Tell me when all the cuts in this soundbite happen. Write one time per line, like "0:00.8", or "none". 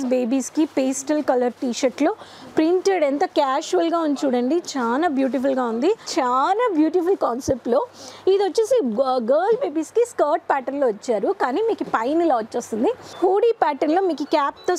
0:06.1
0:13.1